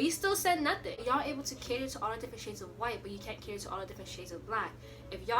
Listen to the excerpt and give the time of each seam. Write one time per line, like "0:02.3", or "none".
0:01.0